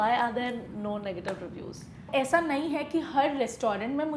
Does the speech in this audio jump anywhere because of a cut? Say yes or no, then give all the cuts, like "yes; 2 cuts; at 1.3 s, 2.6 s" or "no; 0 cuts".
yes; 1 cut; at 2.0 s